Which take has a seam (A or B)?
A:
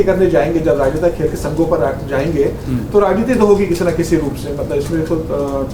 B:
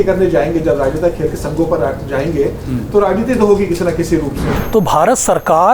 B